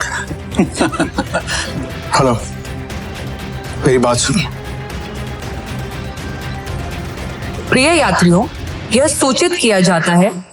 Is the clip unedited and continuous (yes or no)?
no